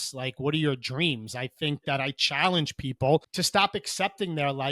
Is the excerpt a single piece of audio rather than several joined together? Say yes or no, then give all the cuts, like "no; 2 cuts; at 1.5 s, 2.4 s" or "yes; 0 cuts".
no; 1 cut; at 3.3 s